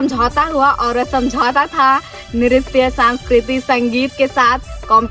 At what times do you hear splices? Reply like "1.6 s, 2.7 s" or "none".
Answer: none